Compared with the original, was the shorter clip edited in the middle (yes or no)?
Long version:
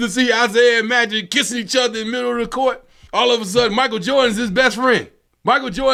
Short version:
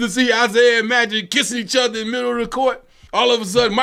no